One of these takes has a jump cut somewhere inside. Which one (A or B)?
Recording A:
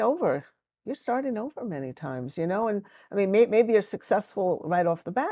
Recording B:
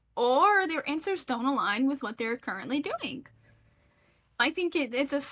B